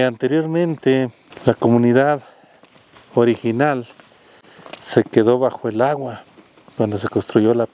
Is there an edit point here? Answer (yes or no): yes